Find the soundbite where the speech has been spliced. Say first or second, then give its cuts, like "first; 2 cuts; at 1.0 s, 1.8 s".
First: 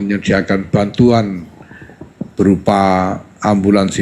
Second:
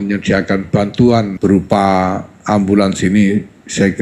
second; 1 cut; at 1.3 s